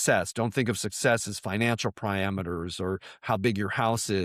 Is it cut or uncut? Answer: uncut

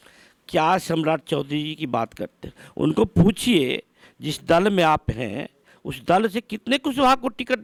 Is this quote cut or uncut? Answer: uncut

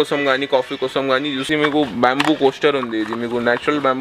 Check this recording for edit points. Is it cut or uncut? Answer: cut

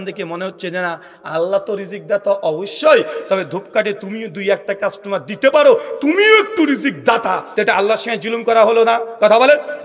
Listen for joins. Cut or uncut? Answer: cut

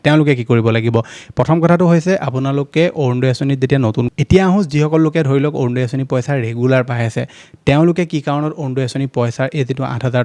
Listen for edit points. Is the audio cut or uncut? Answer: cut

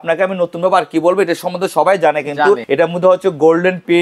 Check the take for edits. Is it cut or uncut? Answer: cut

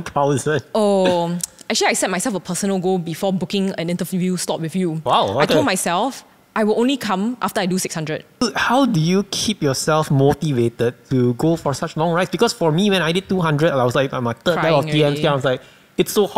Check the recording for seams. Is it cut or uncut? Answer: cut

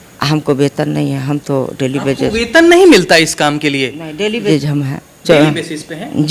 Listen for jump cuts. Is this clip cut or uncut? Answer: cut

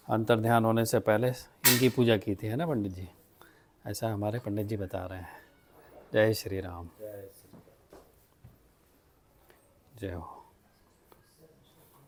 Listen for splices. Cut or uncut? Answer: uncut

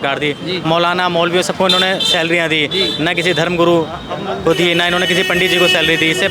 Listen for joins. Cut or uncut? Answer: uncut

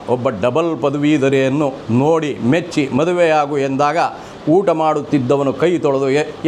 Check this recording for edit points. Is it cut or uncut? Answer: uncut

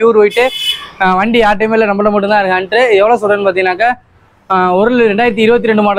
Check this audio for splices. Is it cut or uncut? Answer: uncut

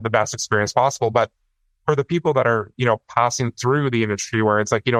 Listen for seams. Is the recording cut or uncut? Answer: uncut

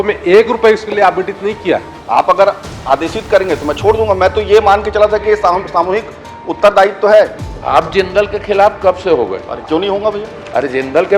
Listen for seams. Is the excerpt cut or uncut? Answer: cut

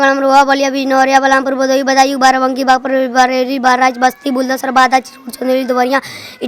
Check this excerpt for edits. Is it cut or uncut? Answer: uncut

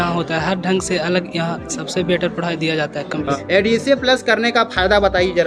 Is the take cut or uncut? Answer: cut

